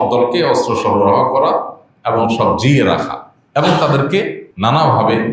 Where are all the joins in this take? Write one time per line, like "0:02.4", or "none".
0:04.4